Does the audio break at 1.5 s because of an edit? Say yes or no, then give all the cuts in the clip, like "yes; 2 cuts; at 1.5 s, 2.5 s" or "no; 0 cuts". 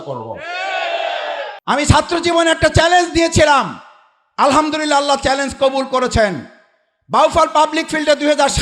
yes; 1 cut; at 1.5 s